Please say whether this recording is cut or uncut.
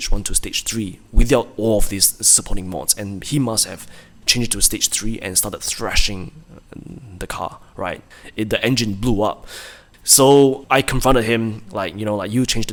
uncut